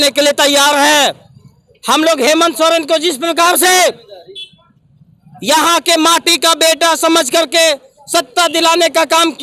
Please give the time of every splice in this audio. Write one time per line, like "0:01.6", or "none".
none

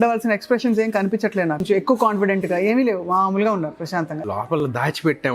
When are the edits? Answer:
0:01.6
0:03.9

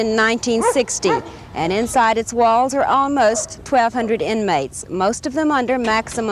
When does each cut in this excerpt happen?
none

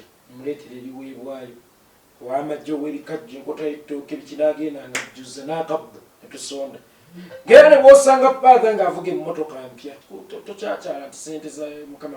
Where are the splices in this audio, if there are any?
0:10.1

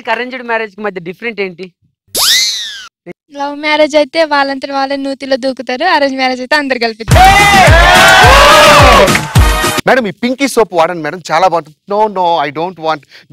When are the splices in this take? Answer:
0:03.1
0:09.3

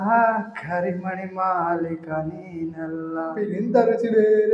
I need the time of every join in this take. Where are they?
0:03.4

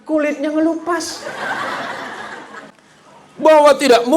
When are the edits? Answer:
0:02.8

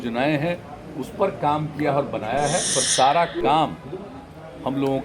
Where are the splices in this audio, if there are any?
0:02.7

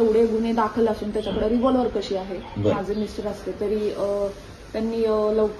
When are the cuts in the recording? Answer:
0:02.7

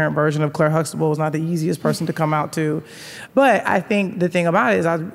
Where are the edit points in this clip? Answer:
0:03.1

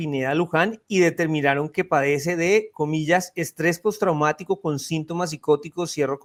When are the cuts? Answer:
none

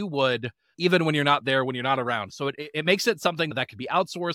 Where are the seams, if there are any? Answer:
none

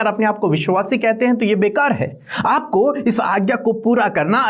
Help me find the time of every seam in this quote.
none

